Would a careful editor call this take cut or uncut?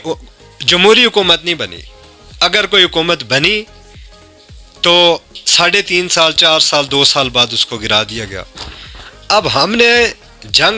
uncut